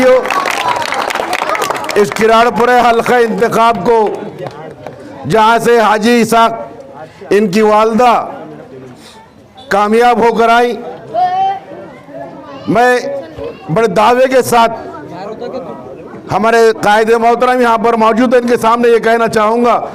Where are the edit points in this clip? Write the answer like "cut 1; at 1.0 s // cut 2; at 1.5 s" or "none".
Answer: none